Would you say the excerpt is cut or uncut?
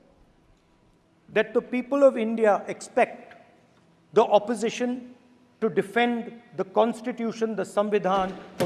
uncut